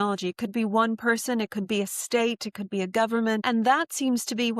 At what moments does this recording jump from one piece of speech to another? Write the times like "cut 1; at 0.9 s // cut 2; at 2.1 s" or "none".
cut 1; at 3.4 s